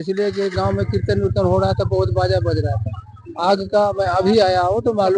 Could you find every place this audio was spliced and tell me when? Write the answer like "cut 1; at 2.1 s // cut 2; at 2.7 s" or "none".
none

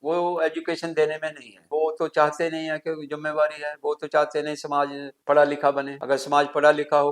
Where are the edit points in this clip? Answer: cut 1; at 1.6 s // cut 2; at 5.1 s // cut 3; at 5.9 s

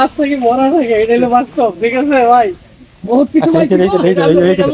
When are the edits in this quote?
none

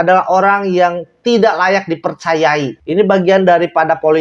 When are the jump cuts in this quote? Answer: cut 1; at 2.8 s

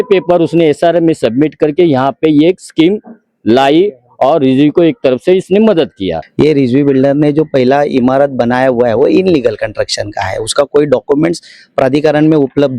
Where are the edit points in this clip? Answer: cut 1; at 6.2 s

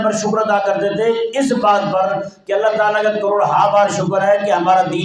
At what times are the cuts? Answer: none

